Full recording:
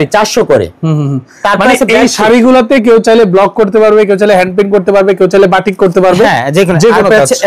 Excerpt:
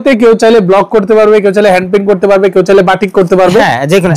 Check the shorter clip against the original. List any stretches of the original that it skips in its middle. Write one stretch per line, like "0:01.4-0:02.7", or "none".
none